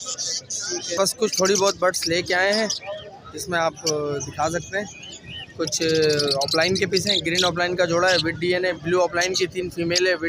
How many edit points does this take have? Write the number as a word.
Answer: one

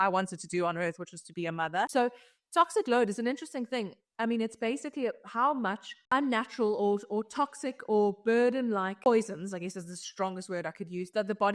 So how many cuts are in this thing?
three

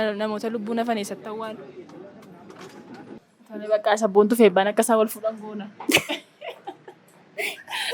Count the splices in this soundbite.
one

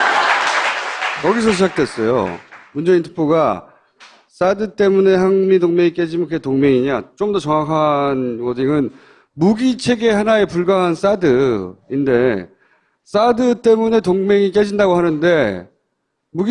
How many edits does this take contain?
one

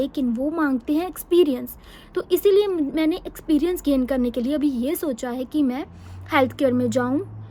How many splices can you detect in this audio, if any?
zero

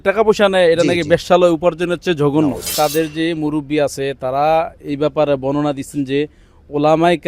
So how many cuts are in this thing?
one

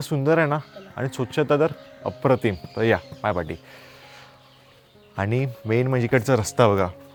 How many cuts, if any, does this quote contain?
zero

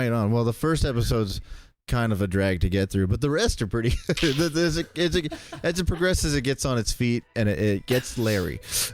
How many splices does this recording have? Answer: zero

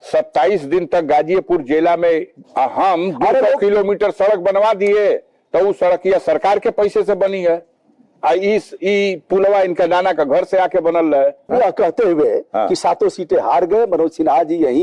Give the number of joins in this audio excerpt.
two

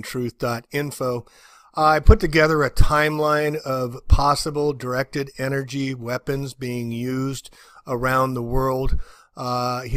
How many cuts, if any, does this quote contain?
zero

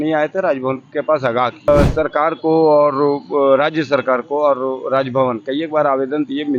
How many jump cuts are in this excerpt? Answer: one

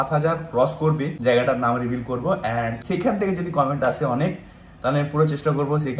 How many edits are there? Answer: two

